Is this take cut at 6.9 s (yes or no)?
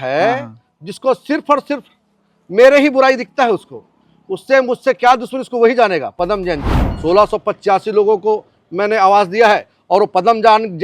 yes